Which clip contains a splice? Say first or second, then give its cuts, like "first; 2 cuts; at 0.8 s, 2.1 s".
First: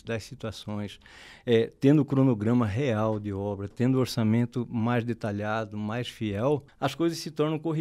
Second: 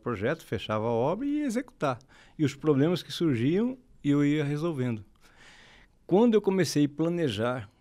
first; 1 cut; at 6.7 s